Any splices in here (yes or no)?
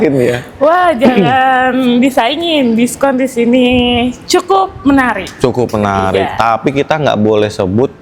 no